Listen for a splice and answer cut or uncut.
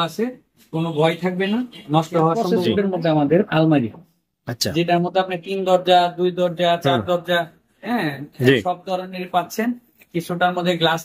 cut